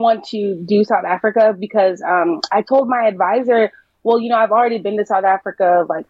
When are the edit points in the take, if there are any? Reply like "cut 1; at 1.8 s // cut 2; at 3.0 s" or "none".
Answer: none